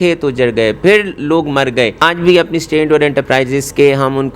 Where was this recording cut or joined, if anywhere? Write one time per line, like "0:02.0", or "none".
0:02.0